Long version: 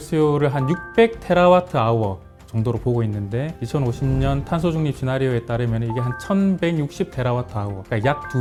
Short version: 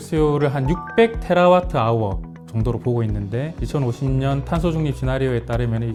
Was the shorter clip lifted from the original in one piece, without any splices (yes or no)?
yes